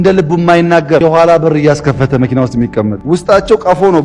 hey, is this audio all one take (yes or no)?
no